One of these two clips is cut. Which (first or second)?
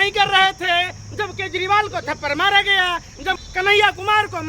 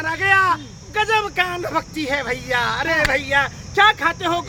first